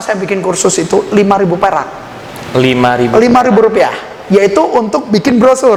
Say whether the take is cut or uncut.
uncut